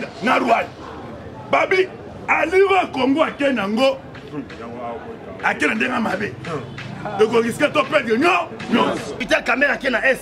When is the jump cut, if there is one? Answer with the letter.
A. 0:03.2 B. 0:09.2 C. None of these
B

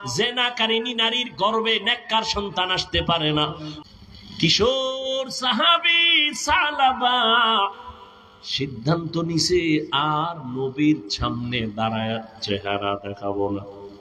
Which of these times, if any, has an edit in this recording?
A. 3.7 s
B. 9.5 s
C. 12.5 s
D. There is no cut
A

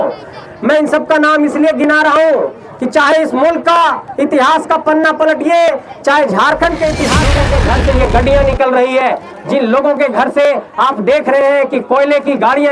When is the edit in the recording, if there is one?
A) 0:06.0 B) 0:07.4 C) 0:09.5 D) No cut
B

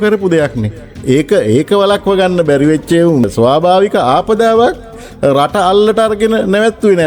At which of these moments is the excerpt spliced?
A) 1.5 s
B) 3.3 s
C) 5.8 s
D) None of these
B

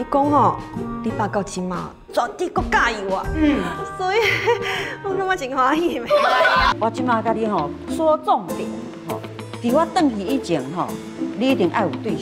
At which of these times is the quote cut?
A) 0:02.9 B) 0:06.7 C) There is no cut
B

